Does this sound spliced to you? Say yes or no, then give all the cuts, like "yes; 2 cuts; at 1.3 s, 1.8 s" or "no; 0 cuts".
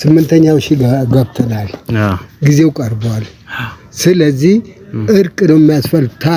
no; 0 cuts